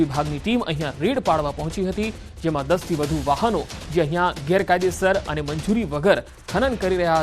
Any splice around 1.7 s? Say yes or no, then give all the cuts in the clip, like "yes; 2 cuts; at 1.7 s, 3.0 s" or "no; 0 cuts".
yes; 1 cut; at 1.7 s